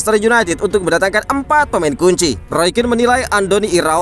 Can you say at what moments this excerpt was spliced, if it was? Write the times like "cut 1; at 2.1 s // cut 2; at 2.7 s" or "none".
cut 1; at 2.4 s

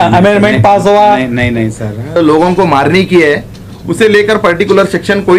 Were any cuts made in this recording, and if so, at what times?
cut 1; at 2.2 s

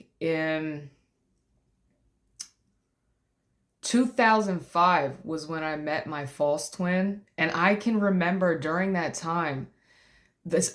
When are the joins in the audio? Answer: none

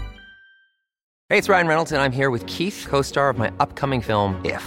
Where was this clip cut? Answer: cut 1; at 1.1 s

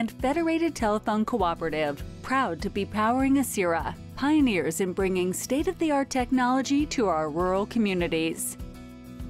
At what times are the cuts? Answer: cut 1; at 8.4 s

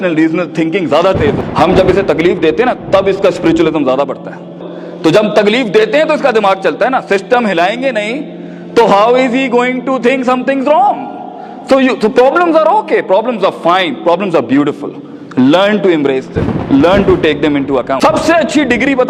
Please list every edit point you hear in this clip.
cut 1; at 1.4 s // cut 2; at 17.9 s

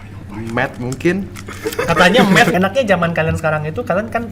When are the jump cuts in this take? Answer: cut 1; at 2.5 s

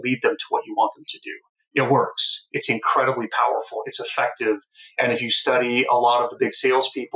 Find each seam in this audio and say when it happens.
none

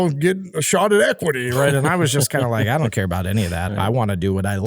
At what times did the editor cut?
cut 1; at 3.7 s

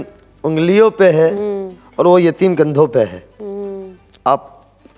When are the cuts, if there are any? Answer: none

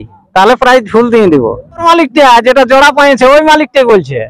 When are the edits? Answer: cut 1; at 1.8 s

